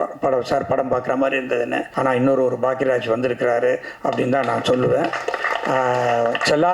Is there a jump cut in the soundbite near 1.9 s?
yes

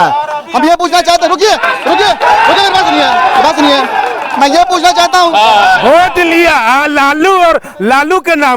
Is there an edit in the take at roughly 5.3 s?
yes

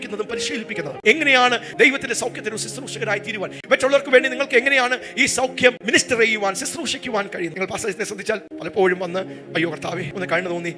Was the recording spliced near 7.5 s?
yes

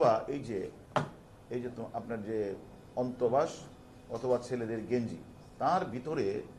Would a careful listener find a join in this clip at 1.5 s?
no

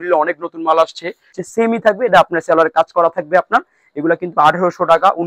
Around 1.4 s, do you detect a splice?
yes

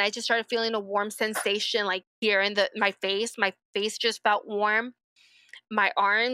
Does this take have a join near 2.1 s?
yes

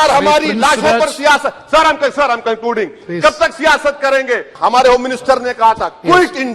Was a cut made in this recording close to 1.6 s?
no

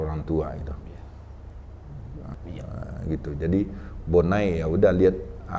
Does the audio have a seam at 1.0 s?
no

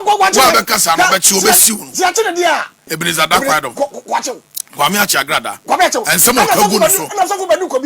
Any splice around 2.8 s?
yes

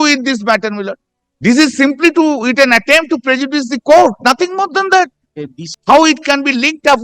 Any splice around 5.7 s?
yes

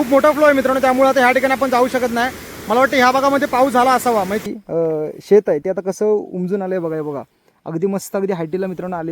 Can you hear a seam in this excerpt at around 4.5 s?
yes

